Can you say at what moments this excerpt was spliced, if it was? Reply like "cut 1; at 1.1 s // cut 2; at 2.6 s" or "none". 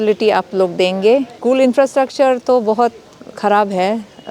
cut 1; at 1.3 s